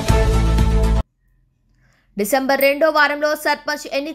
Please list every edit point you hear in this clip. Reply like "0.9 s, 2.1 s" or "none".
1.0 s